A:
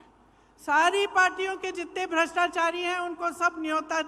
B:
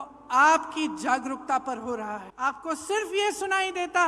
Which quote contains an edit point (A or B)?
B